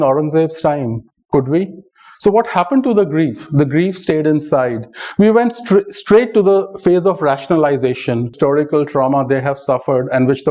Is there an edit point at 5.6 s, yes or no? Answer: no